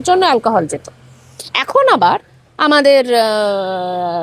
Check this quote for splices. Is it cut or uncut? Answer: uncut